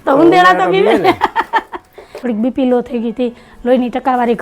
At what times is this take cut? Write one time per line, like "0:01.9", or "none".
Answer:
0:02.1